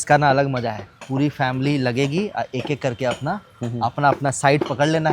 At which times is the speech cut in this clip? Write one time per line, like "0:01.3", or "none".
0:00.9